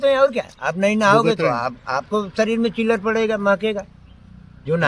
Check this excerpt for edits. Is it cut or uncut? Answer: uncut